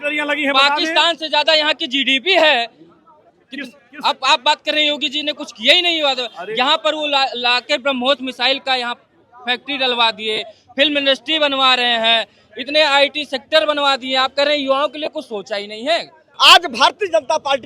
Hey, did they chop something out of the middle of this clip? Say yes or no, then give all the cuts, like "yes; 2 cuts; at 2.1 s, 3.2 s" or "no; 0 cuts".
yes; 1 cut; at 16.3 s